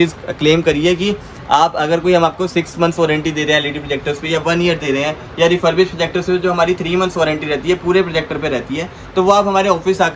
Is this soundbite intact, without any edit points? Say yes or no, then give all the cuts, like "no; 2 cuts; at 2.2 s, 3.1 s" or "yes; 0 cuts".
yes; 0 cuts